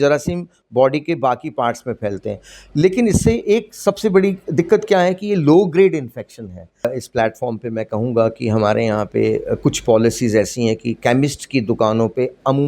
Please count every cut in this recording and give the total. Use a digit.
1